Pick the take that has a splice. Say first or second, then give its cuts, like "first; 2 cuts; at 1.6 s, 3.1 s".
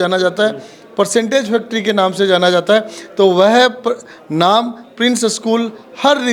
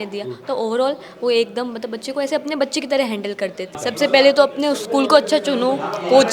second; 1 cut; at 3.8 s